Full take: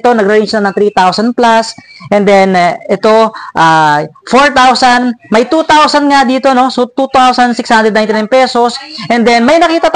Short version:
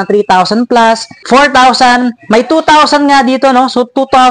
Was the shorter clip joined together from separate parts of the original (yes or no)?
yes